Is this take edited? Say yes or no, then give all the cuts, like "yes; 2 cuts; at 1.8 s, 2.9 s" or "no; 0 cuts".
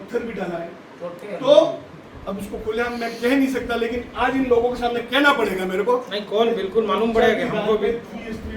yes; 1 cut; at 1.9 s